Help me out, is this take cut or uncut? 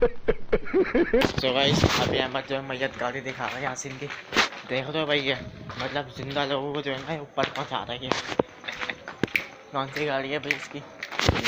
cut